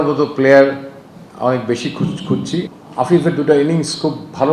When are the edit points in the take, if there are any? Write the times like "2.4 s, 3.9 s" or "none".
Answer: 2.7 s